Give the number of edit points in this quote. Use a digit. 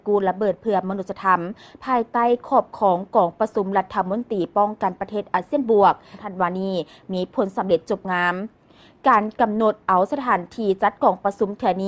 1